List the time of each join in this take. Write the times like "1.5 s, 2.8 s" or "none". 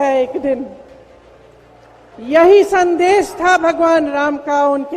2.1 s